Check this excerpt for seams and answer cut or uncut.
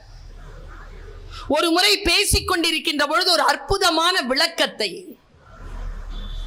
uncut